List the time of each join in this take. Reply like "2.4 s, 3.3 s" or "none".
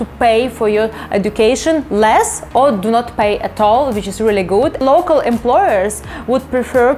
4.8 s